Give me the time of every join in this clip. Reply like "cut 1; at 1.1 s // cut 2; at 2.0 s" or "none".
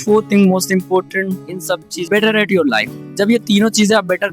cut 1; at 2.1 s